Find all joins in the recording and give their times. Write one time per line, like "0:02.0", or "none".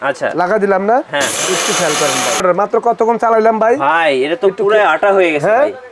0:02.4